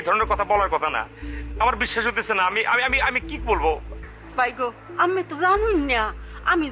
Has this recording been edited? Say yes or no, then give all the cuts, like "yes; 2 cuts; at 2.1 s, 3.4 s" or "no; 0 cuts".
no; 0 cuts